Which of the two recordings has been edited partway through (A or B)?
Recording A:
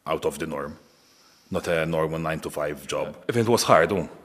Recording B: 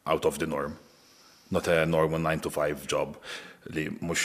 A